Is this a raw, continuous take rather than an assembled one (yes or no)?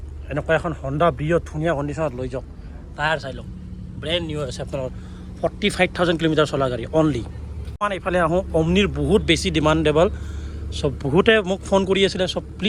yes